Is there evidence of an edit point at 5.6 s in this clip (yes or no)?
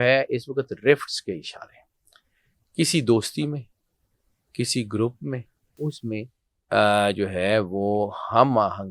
yes